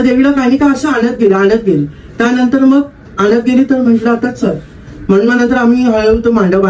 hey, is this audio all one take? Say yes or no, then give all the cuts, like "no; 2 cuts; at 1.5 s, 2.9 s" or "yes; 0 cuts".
yes; 0 cuts